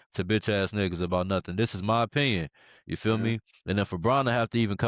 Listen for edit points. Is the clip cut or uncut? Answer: cut